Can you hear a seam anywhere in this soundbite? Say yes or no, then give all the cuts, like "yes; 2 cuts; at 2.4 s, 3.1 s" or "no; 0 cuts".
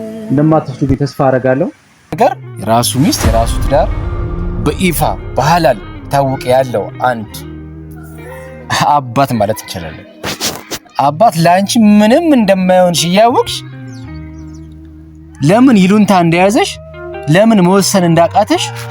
yes; 1 cut; at 2.2 s